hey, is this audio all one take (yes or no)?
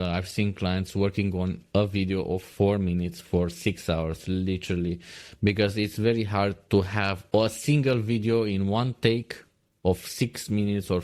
no